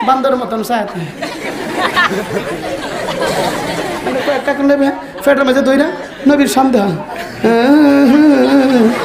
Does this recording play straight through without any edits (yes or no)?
no